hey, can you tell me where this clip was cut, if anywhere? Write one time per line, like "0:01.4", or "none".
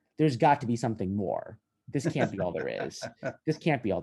none